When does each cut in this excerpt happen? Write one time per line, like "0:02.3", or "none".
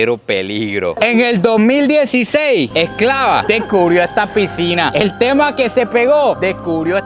0:01.0